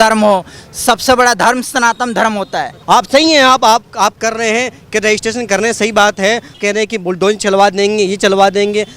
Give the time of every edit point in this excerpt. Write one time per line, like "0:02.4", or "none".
0:02.8
0:06.6